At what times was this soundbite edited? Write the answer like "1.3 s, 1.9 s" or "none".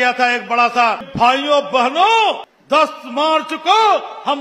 1.1 s, 2.5 s